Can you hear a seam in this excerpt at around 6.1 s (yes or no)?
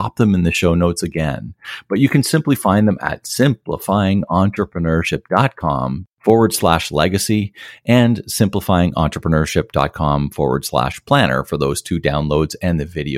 yes